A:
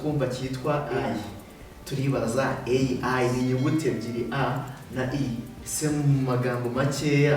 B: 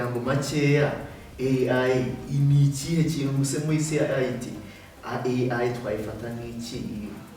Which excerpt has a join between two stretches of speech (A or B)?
A